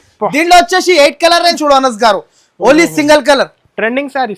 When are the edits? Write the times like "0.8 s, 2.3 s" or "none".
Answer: 1.6 s